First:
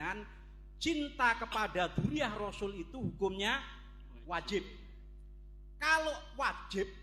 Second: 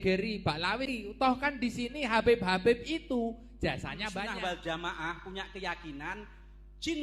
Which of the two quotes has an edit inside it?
second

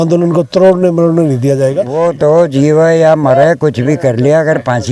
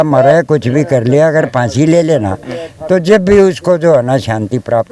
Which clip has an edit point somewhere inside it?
first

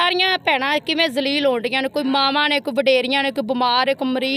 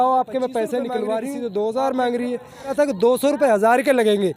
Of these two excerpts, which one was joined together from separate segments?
second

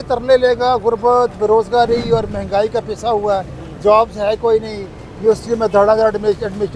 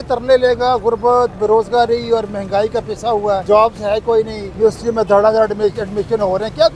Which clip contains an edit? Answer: second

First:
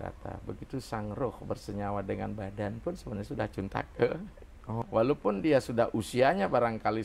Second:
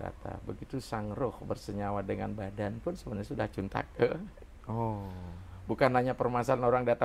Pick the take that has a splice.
first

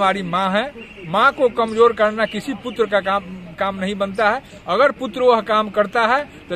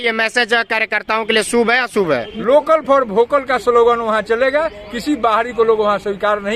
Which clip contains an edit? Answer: second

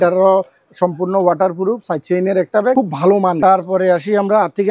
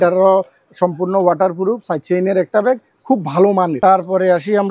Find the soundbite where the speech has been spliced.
first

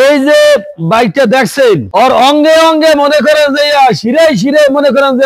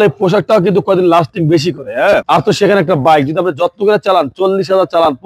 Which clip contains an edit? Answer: first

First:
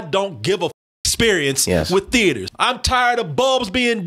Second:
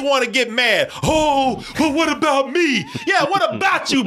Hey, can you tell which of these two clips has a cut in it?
first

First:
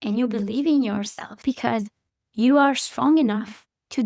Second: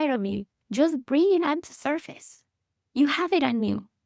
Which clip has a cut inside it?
first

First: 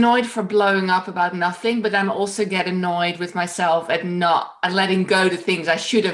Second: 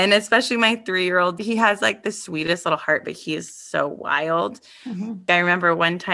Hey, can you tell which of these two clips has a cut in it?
second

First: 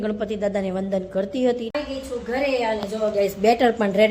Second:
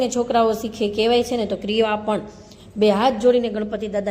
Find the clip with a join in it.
first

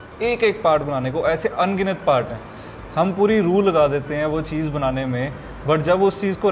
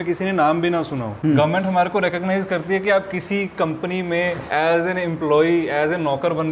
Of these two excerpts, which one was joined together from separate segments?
second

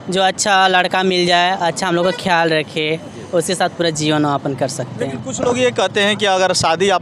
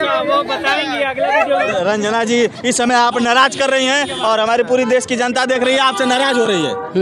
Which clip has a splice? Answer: second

